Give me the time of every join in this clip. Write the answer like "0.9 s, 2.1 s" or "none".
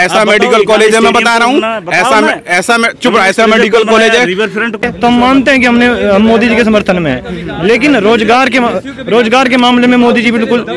4.8 s